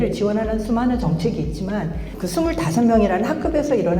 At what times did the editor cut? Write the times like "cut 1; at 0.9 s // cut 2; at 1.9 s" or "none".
cut 1; at 2.2 s